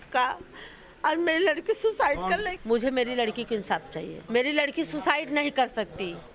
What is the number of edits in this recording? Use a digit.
2